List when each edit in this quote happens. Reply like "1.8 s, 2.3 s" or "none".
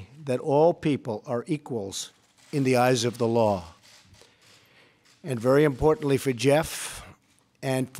none